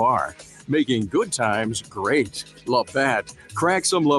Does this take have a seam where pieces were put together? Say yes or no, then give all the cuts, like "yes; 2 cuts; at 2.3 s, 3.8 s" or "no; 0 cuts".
yes; 1 cut; at 2.4 s